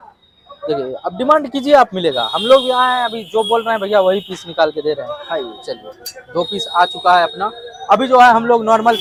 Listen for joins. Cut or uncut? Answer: uncut